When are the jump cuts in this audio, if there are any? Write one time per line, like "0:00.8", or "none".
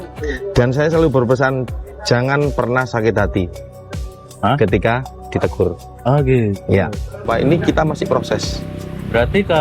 0:07.2